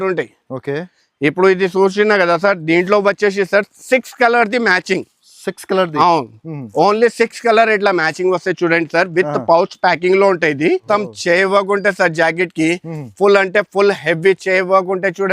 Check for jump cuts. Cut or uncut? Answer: cut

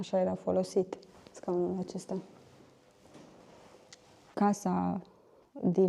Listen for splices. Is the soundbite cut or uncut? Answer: cut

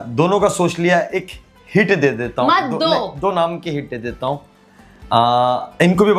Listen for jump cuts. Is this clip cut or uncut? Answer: uncut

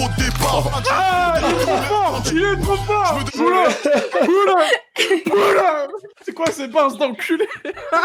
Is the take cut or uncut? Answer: uncut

